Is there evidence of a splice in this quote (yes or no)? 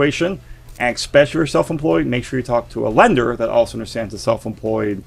no